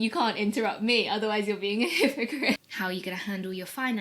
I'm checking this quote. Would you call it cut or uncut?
cut